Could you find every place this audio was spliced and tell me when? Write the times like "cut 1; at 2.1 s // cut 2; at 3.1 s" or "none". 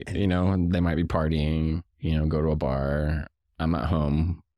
none